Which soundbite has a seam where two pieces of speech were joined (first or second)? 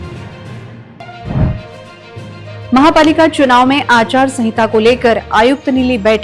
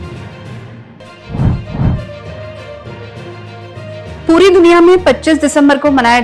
first